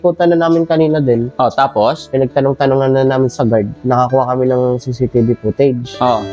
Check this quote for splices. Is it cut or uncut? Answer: uncut